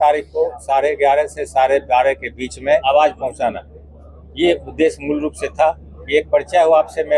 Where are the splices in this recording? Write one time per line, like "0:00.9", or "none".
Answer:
0:02.8